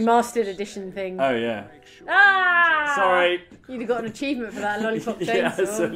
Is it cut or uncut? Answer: cut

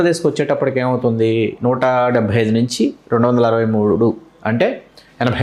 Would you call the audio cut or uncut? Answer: uncut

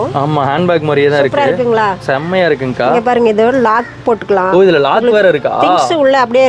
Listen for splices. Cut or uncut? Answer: uncut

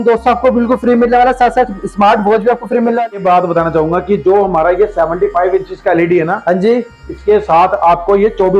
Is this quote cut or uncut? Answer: cut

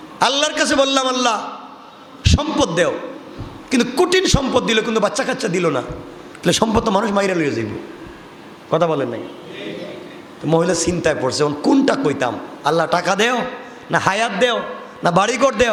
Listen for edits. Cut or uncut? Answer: uncut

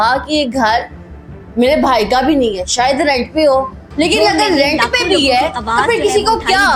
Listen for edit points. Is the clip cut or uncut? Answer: uncut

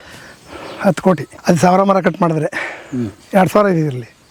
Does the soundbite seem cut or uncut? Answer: cut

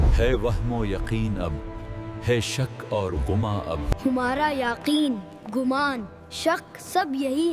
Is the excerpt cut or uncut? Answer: uncut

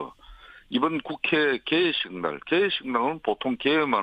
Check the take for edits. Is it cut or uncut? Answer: cut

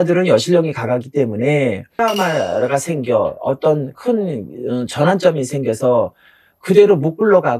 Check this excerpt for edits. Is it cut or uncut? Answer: cut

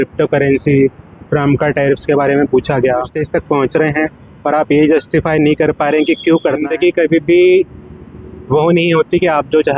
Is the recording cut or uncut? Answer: cut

